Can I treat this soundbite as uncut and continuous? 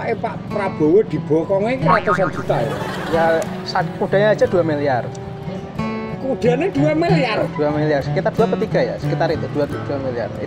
yes; 0 cuts

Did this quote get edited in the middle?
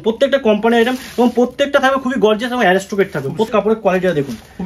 yes; 1 cut; at 3.5 s

